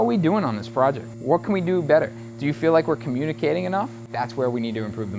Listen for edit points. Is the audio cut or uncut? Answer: cut